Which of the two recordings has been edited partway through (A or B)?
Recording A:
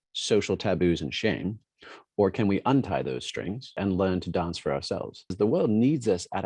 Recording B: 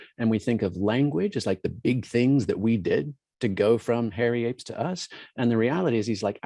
A